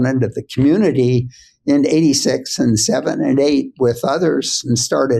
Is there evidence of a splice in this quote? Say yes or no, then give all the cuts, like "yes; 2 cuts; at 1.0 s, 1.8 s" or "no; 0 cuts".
no; 0 cuts